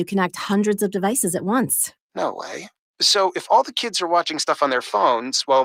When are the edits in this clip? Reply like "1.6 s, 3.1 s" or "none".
none